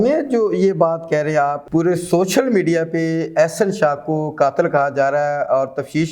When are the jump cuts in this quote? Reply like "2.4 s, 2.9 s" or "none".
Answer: 1.6 s